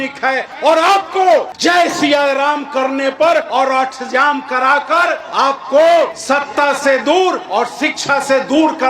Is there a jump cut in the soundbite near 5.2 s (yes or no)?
yes